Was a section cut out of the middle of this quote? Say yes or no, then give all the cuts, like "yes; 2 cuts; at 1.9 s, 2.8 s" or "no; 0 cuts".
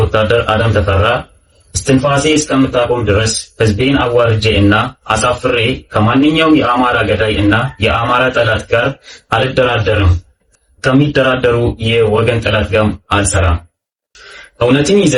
no; 0 cuts